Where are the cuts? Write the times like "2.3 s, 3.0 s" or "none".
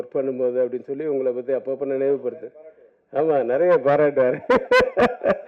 none

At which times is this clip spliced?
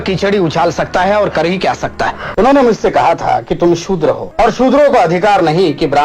2.2 s, 4.3 s

